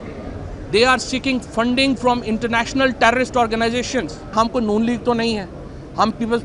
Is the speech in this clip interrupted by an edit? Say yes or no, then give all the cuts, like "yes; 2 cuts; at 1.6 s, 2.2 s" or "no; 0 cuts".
yes; 1 cut; at 4.3 s